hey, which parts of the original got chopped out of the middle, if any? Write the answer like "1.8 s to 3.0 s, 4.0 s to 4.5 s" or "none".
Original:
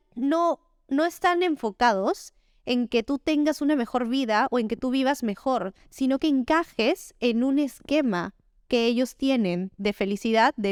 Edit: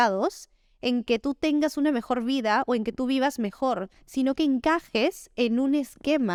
none